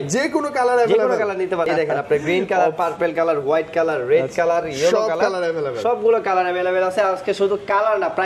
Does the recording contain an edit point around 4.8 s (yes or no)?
no